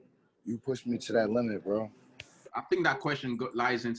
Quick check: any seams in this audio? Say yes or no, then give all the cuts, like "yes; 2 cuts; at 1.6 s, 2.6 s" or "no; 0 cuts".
yes; 1 cut; at 2.5 s